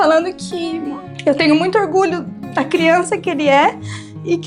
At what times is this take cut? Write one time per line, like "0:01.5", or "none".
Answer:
0:01.0